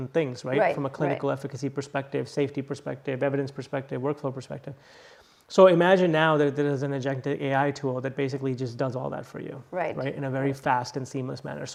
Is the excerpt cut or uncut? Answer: uncut